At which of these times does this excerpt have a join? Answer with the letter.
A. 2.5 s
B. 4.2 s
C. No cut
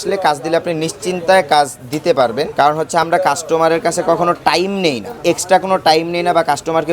A